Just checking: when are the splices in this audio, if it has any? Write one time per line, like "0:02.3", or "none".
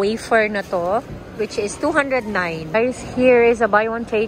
0:02.7